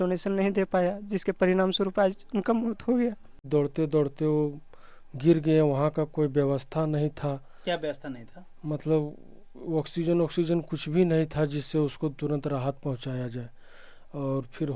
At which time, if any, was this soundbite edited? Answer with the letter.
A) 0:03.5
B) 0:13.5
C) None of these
A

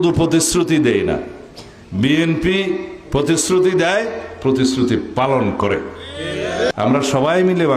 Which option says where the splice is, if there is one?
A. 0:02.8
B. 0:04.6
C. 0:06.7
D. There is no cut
C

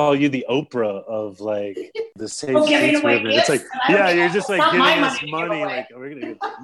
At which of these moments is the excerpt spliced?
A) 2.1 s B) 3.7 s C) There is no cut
A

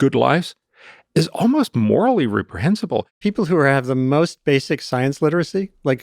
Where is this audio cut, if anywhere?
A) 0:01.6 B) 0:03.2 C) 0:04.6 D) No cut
B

